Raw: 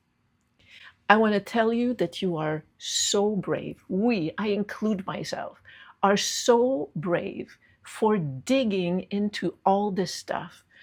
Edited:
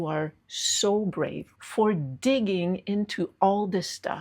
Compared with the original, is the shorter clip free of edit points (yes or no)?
no